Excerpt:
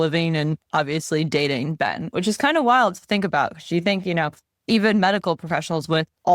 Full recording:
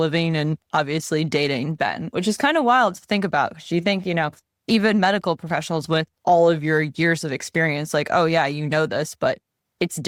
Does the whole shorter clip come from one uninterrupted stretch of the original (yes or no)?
yes